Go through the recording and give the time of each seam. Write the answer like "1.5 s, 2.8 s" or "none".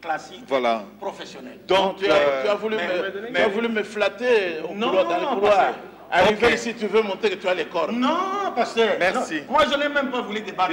none